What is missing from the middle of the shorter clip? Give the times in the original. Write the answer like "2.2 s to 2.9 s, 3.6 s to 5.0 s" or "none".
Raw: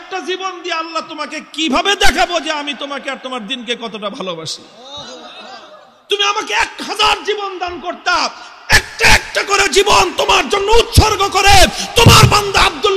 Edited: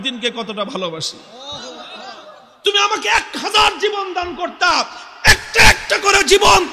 none